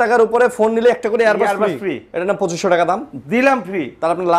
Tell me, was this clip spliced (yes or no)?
no